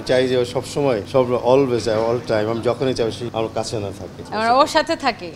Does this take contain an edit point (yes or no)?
yes